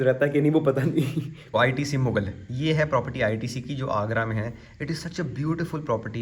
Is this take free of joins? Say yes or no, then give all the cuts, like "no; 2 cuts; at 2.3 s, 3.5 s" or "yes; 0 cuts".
no; 1 cut; at 1.3 s